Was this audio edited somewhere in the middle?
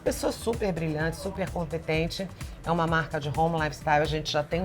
no; 0 cuts

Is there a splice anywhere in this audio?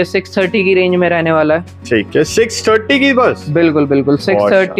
no; 0 cuts

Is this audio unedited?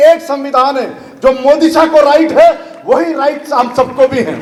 yes; 0 cuts

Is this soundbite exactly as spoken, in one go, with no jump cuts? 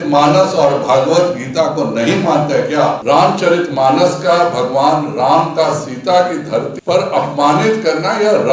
no; 2 cuts; at 3.0 s, 6.7 s

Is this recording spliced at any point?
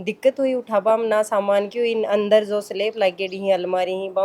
no; 0 cuts

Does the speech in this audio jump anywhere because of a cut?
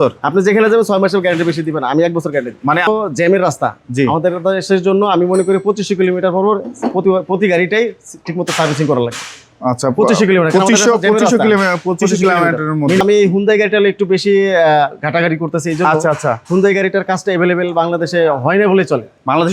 yes; 2 cuts; at 2.9 s, 13.0 s

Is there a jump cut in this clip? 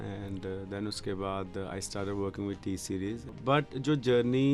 yes; 1 cut; at 3.3 s

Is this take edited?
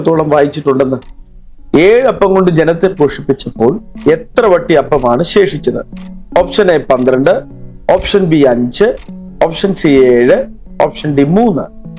yes; 1 cut; at 1.1 s

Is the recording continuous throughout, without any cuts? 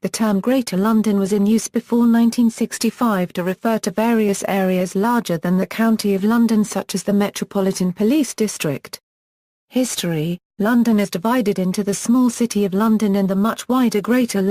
no; 2 cuts; at 1.1 s, 9.7 s

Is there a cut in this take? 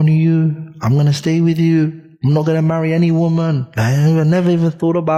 no; 0 cuts

